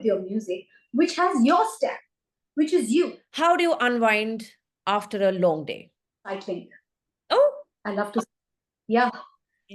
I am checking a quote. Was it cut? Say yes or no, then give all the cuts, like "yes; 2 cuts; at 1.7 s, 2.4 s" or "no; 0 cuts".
yes; 2 cuts; at 3.2 s, 6.3 s